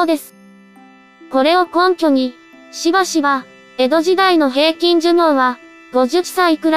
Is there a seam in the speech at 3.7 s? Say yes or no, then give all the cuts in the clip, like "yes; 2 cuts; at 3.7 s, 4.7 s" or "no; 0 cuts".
no; 1 cut; at 5.2 s